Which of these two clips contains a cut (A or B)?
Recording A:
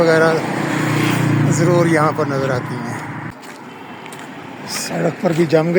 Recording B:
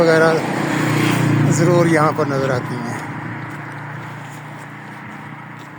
A